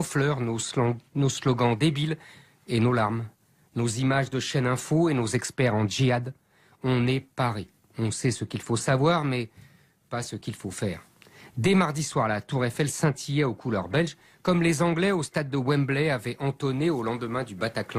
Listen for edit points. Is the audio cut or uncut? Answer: cut